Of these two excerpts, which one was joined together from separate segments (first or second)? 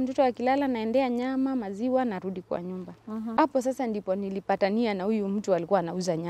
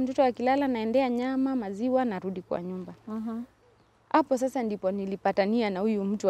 first